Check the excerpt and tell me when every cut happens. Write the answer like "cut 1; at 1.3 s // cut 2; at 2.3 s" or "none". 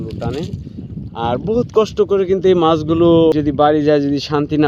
cut 1; at 3.3 s